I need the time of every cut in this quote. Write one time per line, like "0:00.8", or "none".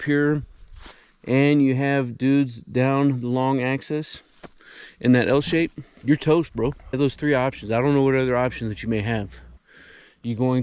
0:05.9
0:07.0